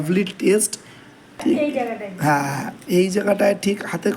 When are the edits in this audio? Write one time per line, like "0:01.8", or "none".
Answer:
0:01.4